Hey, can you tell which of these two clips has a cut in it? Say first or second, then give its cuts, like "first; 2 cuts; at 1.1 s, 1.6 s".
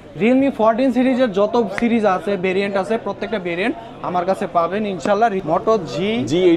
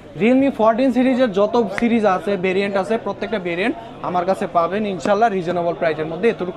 first; 1 cut; at 5.4 s